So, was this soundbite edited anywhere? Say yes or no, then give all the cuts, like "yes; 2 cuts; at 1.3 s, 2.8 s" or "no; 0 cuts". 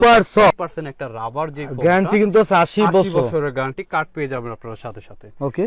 no; 0 cuts